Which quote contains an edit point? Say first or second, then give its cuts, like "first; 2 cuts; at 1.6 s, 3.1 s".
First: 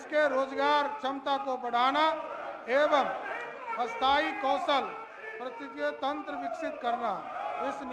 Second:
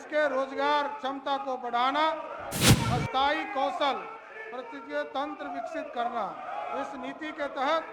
second; 1 cut; at 2.5 s